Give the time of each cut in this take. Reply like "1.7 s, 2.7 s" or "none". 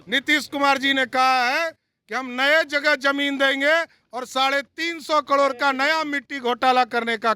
none